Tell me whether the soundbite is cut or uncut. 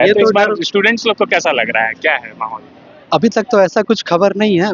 uncut